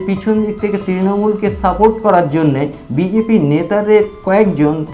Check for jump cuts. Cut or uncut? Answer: uncut